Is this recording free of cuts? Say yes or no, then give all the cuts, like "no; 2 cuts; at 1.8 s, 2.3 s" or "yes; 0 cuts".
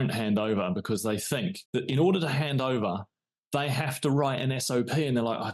no; 1 cut; at 1.6 s